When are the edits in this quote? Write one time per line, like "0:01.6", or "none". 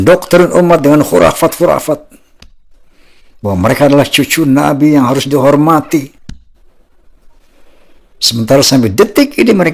none